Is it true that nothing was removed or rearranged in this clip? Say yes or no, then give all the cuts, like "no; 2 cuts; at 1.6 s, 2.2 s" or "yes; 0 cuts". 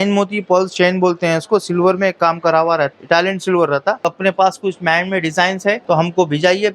no; 3 cuts; at 2.9 s, 4.0 s, 5.8 s